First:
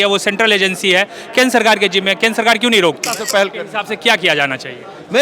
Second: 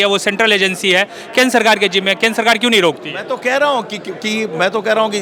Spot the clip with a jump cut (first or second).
first